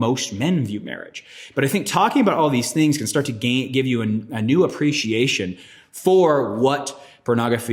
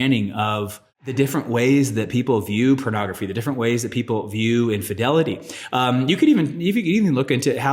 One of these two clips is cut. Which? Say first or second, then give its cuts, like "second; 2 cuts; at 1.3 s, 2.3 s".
second; 1 cut; at 1.1 s